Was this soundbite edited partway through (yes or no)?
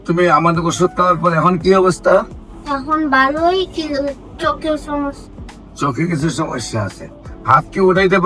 no